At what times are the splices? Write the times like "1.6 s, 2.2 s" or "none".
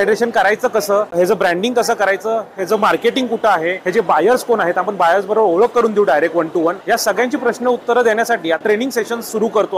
1.1 s, 3.8 s, 6.8 s, 8.7 s